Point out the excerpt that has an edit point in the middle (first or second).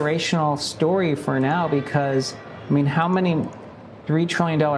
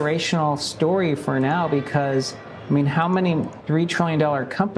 second